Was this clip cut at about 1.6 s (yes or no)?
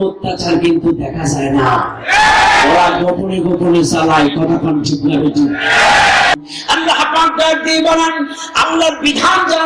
no